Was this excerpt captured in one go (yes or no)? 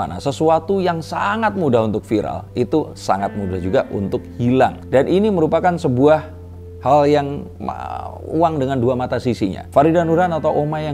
yes